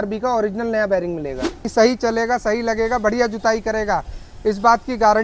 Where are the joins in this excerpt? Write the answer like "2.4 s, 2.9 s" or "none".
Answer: 1.6 s